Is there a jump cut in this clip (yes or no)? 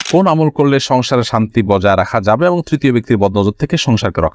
no